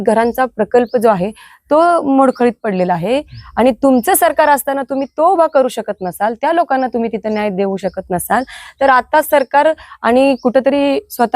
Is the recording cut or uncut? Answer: uncut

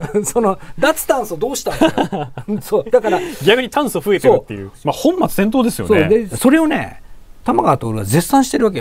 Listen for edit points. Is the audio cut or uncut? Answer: cut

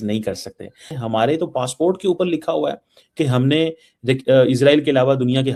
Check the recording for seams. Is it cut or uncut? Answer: uncut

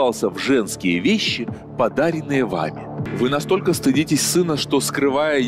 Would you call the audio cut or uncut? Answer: cut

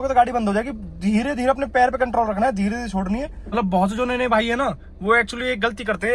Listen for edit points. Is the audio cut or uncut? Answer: cut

